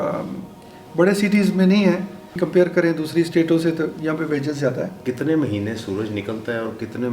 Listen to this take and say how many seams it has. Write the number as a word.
two